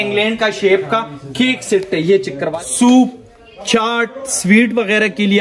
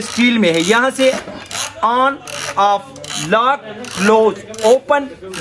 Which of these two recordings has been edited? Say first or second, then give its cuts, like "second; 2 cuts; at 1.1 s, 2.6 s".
first; 1 cut; at 2.4 s